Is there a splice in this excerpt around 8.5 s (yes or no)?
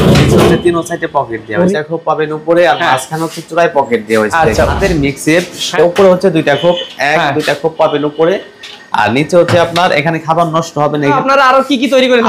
no